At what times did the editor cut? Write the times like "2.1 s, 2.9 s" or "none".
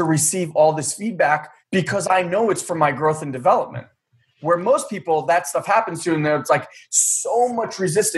1.5 s